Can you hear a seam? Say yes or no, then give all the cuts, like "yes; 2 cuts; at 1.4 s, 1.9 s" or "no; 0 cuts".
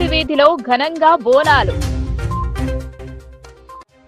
no; 0 cuts